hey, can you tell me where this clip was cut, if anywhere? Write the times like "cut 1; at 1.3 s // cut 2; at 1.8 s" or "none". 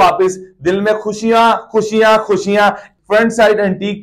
cut 1; at 2.9 s